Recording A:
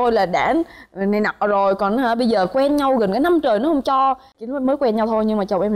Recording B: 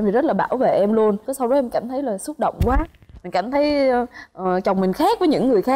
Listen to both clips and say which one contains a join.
A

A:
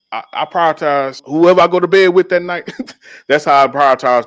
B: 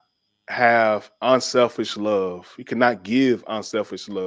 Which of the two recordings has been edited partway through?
A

